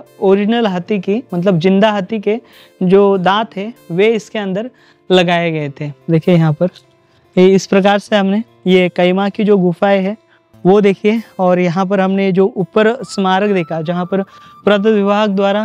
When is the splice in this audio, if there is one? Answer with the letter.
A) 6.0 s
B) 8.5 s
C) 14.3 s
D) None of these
A